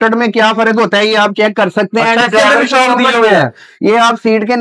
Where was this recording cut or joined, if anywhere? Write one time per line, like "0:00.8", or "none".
none